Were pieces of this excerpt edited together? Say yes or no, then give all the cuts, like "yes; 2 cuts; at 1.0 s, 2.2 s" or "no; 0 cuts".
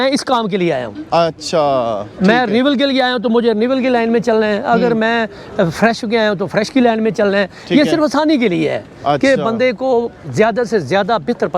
no; 0 cuts